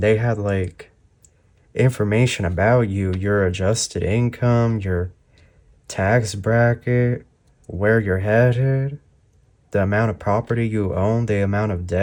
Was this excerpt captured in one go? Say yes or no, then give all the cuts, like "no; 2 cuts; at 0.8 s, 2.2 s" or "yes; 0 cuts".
yes; 0 cuts